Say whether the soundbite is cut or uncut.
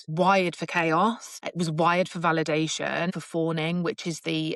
uncut